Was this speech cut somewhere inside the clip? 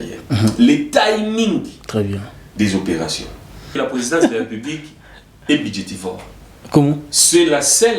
yes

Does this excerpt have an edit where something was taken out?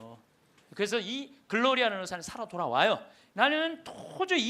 yes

